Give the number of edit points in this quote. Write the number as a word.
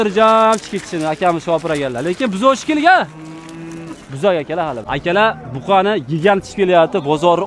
one